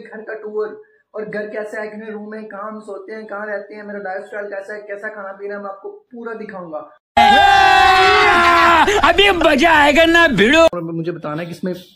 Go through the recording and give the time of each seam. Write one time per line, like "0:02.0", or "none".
0:10.7